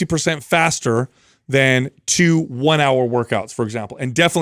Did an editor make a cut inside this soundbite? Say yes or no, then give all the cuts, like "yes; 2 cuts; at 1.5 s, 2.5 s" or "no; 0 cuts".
no; 0 cuts